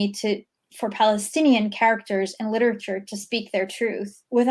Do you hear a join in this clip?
no; 0 cuts

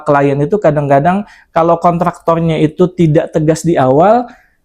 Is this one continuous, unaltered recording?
yes; 0 cuts

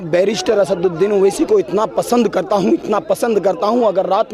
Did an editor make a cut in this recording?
no; 0 cuts

